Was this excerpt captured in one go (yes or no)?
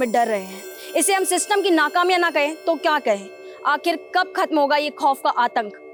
yes